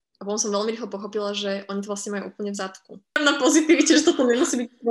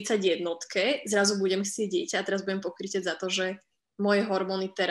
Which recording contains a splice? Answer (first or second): first